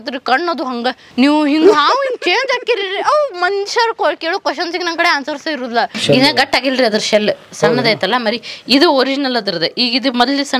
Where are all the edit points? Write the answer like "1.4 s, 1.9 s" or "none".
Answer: 1.0 s, 6.0 s